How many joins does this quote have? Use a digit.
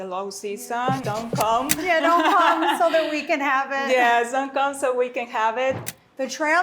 2